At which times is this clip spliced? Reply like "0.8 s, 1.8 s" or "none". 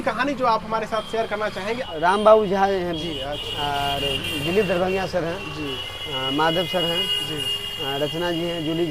1.8 s